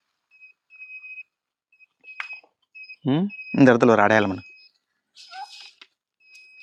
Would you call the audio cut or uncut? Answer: uncut